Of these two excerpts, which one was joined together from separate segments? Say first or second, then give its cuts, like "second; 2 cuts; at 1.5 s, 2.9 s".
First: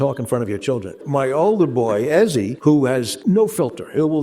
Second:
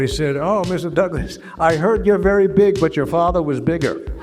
first; 2 cuts; at 1.0 s, 2.8 s